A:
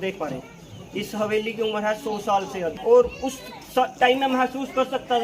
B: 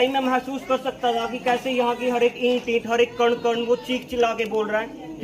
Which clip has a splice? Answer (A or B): A